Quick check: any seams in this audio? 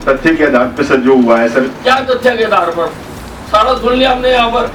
no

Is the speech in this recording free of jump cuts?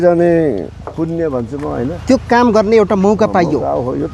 yes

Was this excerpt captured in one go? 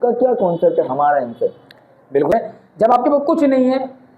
no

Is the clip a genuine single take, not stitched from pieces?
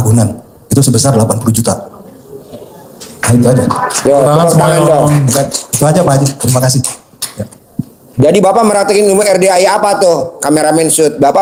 yes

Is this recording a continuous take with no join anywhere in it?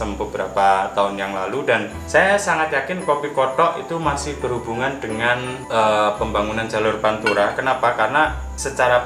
no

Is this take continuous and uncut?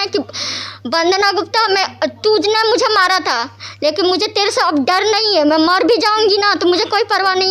yes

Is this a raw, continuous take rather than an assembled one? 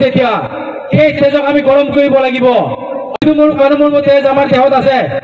no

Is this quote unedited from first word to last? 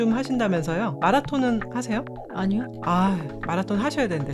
no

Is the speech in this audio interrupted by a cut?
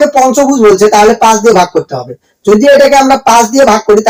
no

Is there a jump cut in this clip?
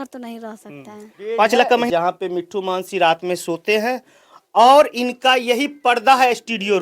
yes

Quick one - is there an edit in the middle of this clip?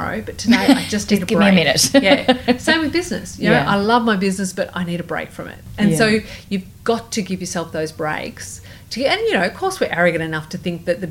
no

